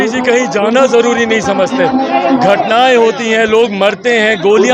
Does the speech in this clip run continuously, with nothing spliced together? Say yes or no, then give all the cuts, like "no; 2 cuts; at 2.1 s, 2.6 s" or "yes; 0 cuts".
yes; 0 cuts